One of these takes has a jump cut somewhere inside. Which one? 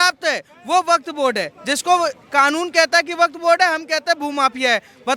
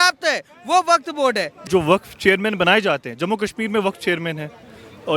second; 1 cut; at 1.5 s

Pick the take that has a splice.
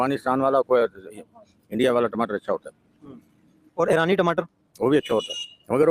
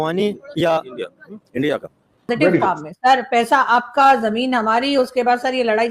second; 1 cut; at 2.3 s

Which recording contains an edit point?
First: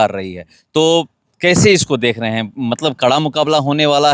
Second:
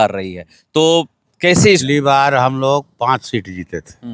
second; 1 cut; at 1.8 s

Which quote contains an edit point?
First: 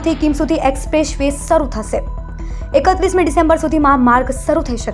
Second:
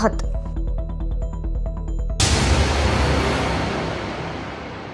second; 1 cut; at 2.2 s

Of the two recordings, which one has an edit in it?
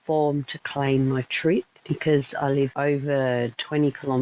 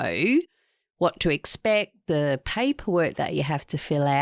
first; 2 cuts; at 1.8 s, 2.7 s

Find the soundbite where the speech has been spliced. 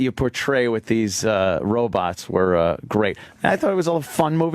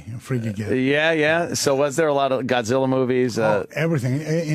first; 1 cut; at 2.6 s

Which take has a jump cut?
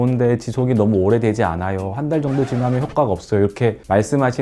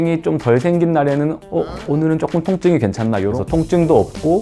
second; 2 cuts; at 1.4 s, 3.3 s

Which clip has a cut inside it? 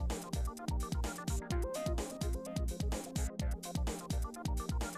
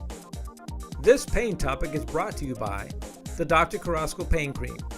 second; 1 cut; at 1.0 s

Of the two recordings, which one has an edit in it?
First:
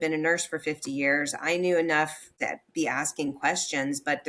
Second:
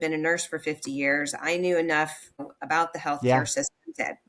first; 1 cut; at 2.3 s

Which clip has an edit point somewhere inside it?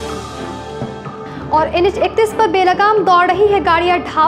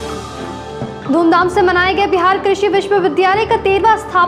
first; 1 cut; at 1.0 s

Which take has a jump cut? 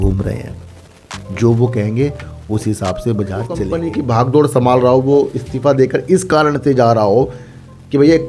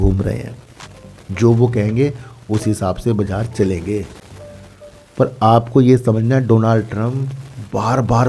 first; 1 cut; at 3.7 s

